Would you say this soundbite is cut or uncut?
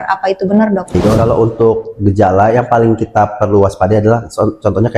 cut